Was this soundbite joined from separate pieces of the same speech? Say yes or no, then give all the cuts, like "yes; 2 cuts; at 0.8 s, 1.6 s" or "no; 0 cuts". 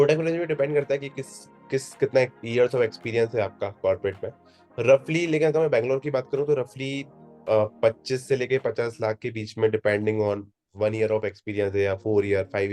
no; 0 cuts